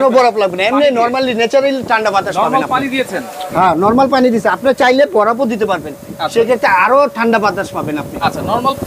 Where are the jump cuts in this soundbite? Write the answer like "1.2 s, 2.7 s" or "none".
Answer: none